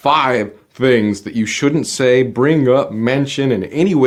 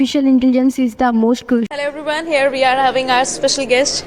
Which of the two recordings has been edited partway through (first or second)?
second